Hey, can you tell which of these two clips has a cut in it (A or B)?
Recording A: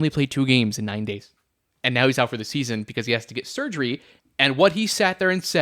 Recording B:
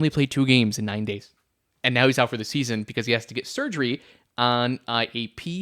A